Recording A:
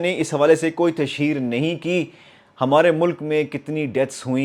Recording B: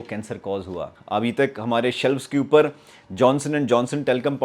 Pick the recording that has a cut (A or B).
B